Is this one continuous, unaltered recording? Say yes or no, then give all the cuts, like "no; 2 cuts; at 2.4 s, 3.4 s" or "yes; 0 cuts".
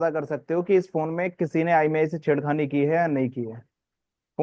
yes; 0 cuts